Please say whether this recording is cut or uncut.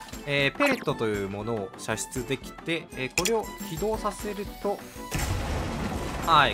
cut